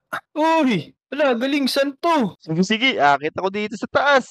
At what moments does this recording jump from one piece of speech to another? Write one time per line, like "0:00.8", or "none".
0:02.4